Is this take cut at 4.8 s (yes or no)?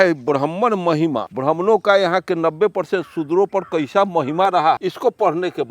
yes